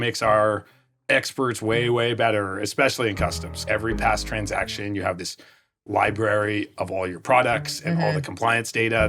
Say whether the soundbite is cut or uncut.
cut